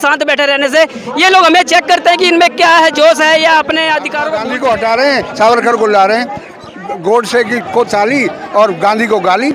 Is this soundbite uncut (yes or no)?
no